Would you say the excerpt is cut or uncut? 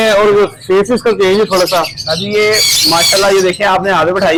uncut